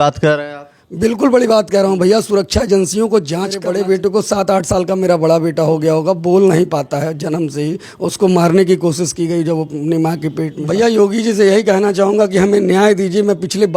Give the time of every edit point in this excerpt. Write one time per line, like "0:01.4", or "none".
0:03.6
0:10.5